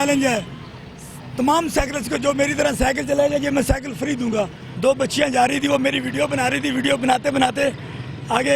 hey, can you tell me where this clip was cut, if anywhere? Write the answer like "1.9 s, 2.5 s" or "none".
4.6 s